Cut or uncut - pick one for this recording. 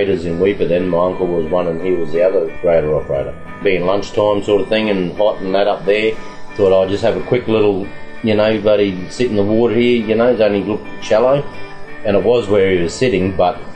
cut